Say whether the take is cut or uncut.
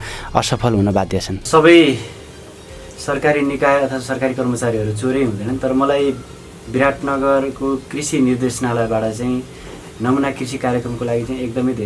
cut